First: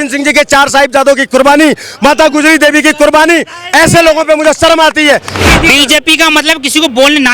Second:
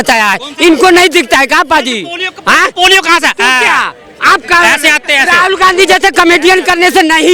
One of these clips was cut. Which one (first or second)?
first